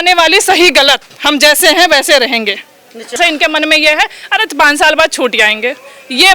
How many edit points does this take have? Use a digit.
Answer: 1